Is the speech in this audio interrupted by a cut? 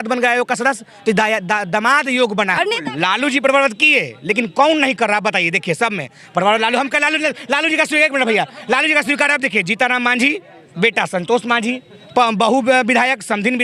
yes; 1 cut; at 2.6 s

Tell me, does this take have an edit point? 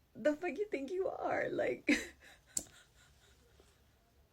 yes; 1 cut; at 2.6 s

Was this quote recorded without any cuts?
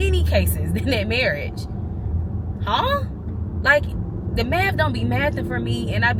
yes; 0 cuts

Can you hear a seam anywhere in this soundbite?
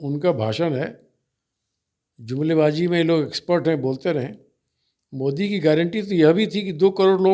no; 0 cuts

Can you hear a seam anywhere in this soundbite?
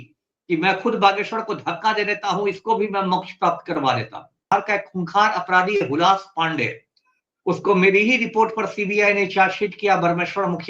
yes; 1 cut; at 4.5 s

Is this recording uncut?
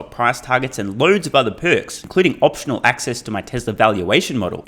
yes; 0 cuts

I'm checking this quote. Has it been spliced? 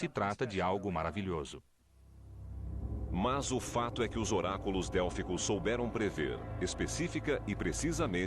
yes; 1 cut; at 5.7 s

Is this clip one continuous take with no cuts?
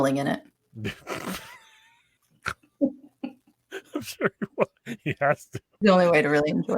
no; 1 cut; at 5.8 s

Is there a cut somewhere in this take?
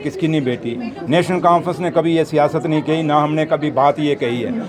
no; 0 cuts

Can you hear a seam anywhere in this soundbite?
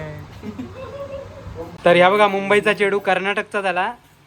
yes; 1 cut; at 1.7 s

